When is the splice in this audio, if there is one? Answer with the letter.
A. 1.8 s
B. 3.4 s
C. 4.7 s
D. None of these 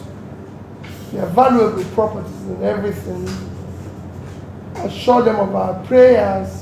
D